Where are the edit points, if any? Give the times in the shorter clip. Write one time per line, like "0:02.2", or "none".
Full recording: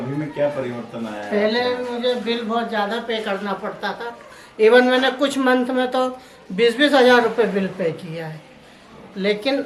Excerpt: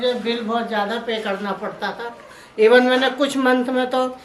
none